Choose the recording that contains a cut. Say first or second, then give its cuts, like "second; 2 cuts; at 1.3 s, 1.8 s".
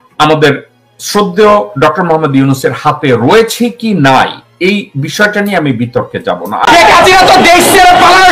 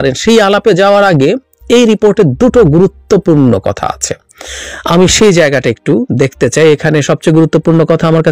first; 1 cut; at 6.6 s